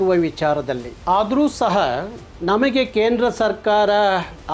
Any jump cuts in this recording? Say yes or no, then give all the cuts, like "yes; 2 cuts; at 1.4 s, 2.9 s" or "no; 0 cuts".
no; 0 cuts